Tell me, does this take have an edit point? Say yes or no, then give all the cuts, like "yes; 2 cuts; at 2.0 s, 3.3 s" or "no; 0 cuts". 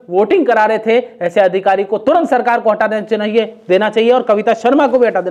no; 0 cuts